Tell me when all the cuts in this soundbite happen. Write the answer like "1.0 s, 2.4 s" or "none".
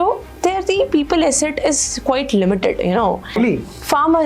3.3 s